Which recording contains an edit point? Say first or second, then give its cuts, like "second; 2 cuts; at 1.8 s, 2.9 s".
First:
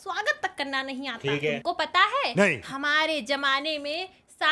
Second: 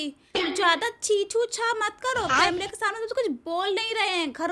first; 1 cut; at 1.5 s